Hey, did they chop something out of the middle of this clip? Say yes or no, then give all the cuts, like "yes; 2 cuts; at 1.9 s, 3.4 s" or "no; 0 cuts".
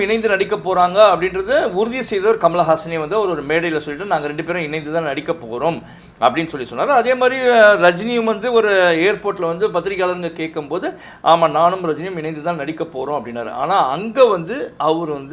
no; 0 cuts